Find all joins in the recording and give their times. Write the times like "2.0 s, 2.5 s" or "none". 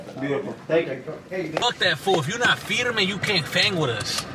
1.6 s

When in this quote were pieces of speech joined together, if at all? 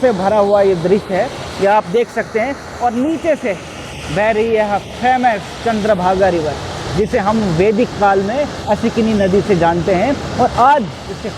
none

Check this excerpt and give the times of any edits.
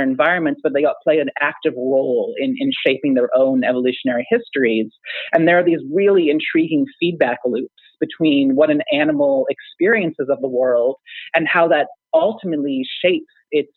none

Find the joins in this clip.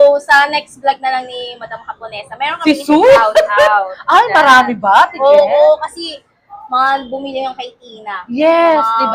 none

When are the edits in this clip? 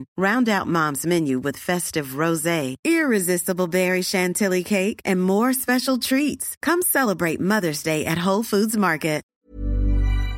9.4 s

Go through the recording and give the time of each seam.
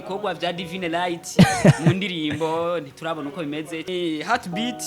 3.8 s

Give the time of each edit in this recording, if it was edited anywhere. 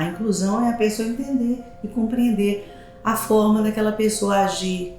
none

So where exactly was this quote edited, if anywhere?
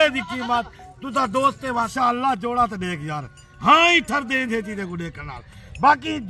1.9 s

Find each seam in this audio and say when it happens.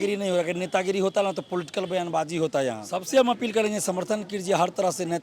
2.9 s

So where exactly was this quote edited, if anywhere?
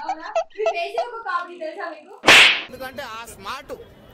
2.7 s

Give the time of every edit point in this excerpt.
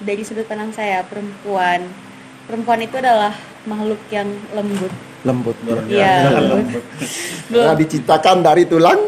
none

